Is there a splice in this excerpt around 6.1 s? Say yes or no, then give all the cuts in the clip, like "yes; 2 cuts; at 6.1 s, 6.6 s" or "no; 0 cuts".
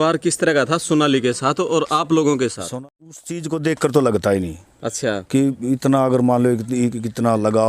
no; 1 cut; at 2.6 s